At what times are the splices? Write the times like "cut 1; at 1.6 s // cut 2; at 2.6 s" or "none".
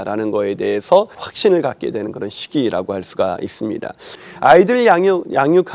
cut 1; at 1.2 s // cut 2; at 4.1 s

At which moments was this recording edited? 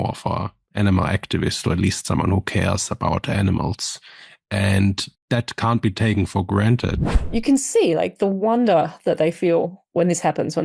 cut 1; at 5.1 s // cut 2; at 7.0 s

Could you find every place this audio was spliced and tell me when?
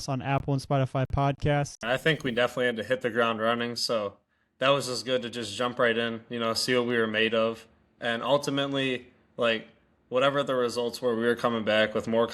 cut 1; at 1.8 s

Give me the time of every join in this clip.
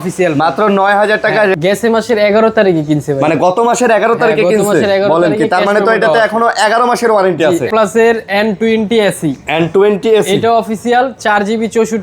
cut 1; at 1.5 s // cut 2; at 7.7 s

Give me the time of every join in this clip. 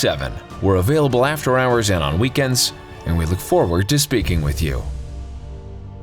cut 1; at 4.8 s

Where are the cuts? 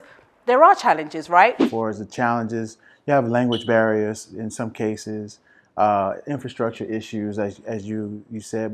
cut 1; at 1.6 s

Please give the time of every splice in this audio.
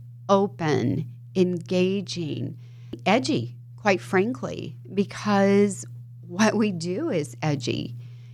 cut 1; at 2.9 s

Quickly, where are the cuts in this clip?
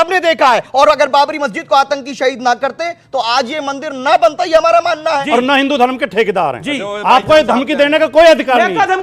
cut 1; at 5.2 s

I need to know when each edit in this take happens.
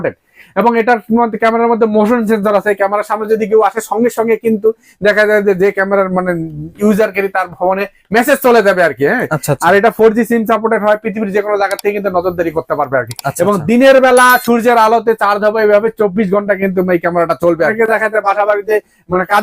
cut 1; at 17.7 s

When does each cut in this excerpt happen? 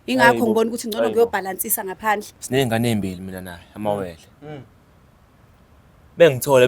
cut 1; at 2.3 s

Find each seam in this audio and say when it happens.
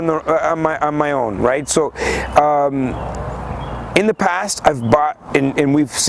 none

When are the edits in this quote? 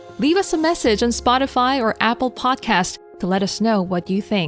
none

